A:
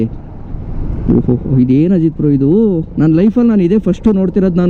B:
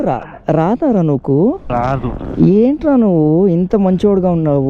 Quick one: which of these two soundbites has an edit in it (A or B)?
B